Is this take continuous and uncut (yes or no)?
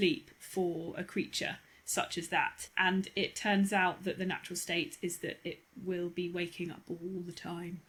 yes